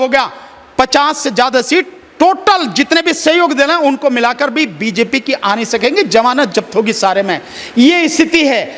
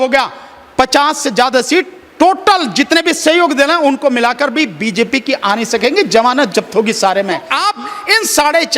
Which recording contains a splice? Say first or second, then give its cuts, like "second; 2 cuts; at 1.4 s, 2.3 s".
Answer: second; 1 cut; at 7.5 s